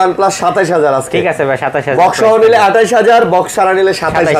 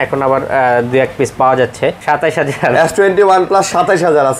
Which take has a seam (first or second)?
second